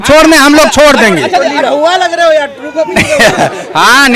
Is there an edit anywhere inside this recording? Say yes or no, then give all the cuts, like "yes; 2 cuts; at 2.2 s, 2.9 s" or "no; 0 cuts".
no; 0 cuts